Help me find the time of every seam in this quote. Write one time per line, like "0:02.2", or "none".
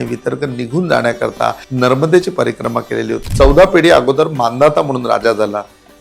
0:01.6
0:03.2